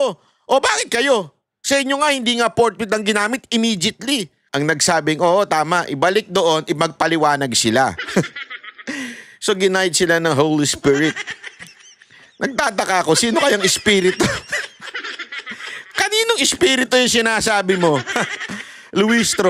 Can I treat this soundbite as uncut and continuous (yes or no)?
no